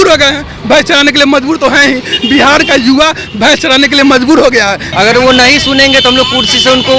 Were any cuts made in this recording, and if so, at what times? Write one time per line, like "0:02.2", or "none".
0:04.8